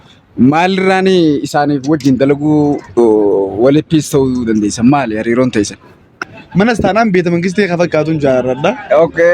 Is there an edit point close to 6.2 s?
yes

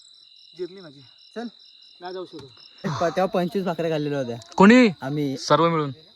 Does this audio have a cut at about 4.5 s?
no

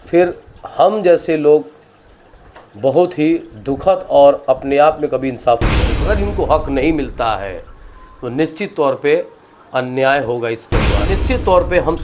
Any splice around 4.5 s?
no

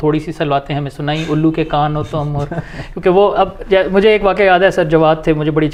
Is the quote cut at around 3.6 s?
no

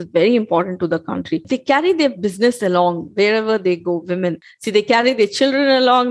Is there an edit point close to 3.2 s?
no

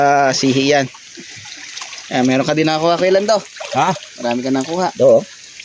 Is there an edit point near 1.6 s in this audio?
no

